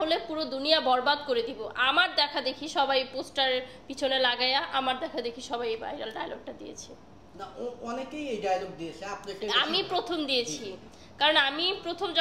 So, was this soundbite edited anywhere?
no; 0 cuts

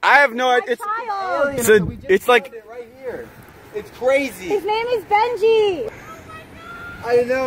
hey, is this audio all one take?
no; 1 cut; at 5.9 s

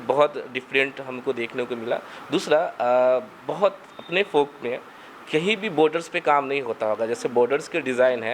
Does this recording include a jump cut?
no; 0 cuts

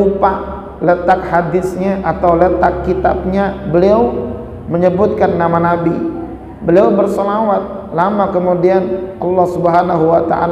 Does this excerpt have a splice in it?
no; 0 cuts

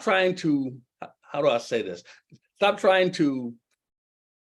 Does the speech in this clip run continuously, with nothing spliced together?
yes; 0 cuts

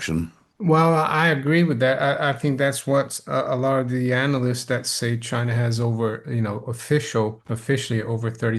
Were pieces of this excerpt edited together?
yes; 1 cut; at 7.5 s

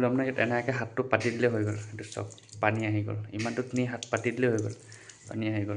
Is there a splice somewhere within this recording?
no; 0 cuts

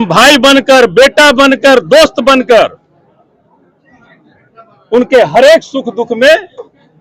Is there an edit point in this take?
no; 0 cuts

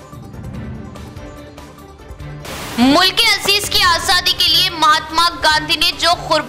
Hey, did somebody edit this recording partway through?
yes; 1 cut; at 1.1 s

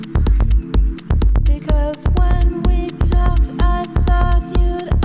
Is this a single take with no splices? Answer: yes; 0 cuts

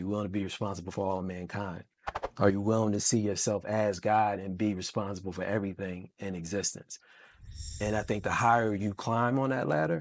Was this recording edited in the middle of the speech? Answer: no; 0 cuts

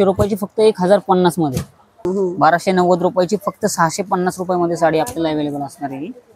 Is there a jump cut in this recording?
yes; 1 cut; at 2.1 s

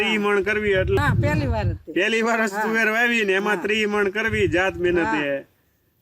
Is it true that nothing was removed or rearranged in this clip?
no; 1 cut; at 1.0 s

